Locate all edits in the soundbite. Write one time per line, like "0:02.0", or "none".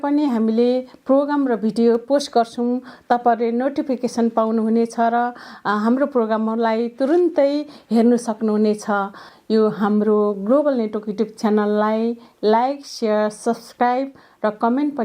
0:09.3